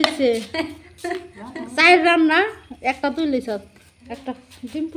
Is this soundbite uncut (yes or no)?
yes